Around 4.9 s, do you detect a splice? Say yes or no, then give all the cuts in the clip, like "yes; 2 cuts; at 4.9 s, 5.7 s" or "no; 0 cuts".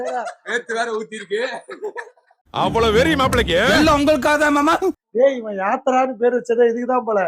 yes; 1 cut; at 4.9 s